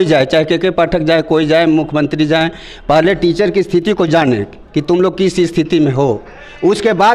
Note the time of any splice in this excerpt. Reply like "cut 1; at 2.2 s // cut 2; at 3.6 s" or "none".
none